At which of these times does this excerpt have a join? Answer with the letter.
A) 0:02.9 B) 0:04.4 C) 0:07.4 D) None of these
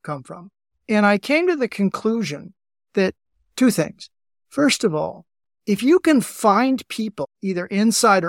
D